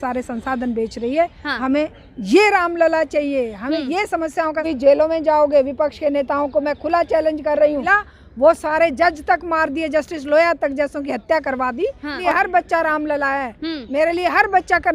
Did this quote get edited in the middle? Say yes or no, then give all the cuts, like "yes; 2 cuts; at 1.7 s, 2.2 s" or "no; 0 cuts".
yes; 3 cuts; at 4.7 s, 8.1 s, 12.2 s